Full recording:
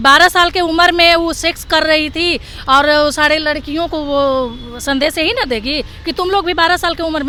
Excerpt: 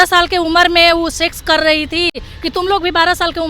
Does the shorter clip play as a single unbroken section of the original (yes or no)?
no